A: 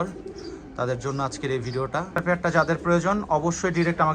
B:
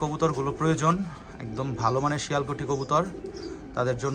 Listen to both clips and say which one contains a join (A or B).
A